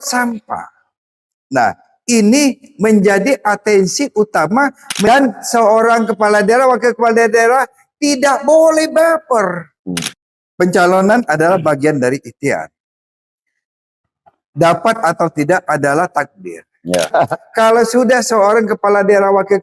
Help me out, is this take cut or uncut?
cut